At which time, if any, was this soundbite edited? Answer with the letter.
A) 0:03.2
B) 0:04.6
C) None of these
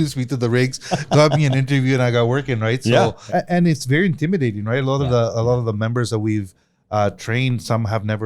A